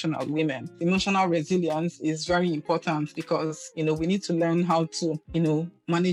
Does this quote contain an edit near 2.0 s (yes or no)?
no